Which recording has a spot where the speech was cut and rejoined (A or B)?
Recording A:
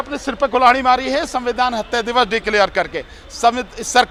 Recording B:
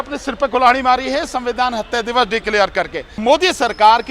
B